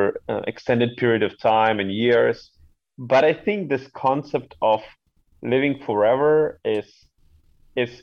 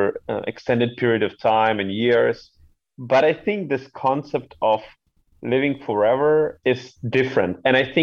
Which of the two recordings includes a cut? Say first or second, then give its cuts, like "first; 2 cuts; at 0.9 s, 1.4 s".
second; 1 cut; at 6.6 s